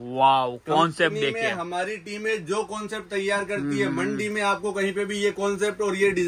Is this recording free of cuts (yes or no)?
yes